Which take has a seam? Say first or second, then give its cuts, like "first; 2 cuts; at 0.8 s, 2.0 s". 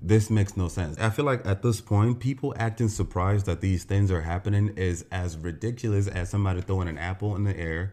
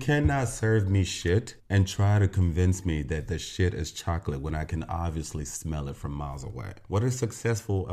second; 1 cut; at 6.8 s